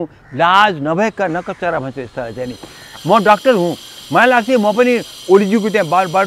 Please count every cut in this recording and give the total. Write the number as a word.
one